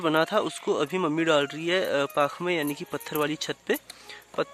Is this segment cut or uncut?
uncut